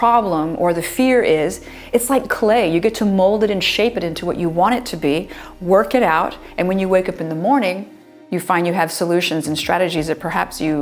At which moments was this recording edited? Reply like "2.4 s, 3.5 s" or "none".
none